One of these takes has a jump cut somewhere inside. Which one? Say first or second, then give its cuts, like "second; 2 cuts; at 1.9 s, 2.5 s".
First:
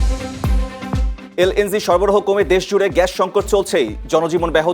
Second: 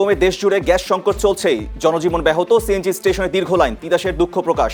first; 1 cut; at 1.2 s